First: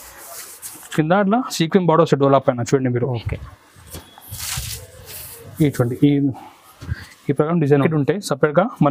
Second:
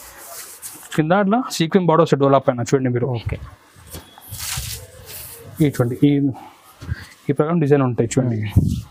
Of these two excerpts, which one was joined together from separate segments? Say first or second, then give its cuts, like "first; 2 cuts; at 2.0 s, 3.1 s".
first; 1 cut; at 7.8 s